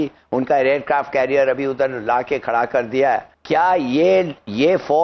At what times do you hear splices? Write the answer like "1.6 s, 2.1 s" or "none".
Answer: 3.3 s